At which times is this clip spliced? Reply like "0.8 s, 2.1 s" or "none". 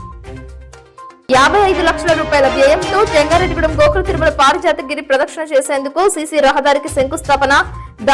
1.2 s